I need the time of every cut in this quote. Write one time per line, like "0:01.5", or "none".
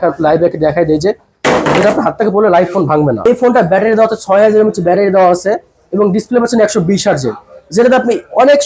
0:03.2